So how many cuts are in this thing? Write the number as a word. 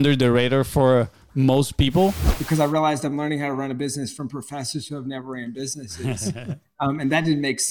one